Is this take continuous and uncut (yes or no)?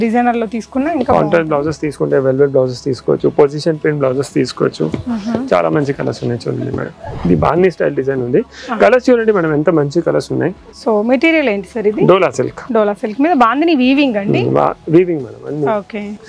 no